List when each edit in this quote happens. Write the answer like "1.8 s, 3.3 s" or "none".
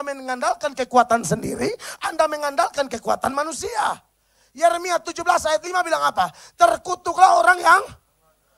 none

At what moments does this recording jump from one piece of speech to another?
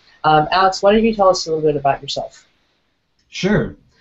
1.4 s

